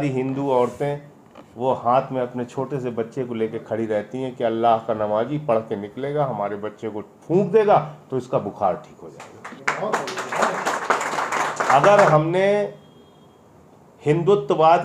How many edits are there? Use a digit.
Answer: 1